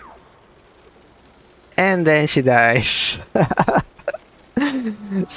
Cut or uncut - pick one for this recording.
uncut